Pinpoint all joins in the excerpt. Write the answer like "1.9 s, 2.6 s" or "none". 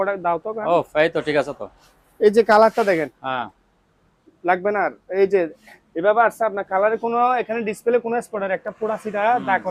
none